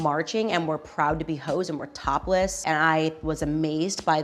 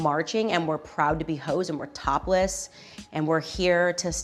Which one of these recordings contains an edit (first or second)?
first